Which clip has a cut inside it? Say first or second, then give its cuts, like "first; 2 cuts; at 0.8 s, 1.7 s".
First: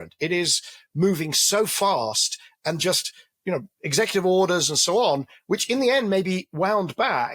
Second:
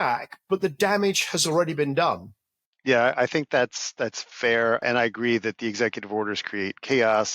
second; 1 cut; at 4.8 s